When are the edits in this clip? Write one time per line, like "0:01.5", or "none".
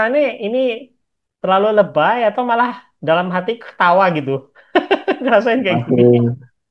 none